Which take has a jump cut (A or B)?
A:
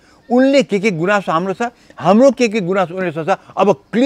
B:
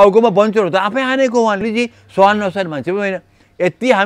B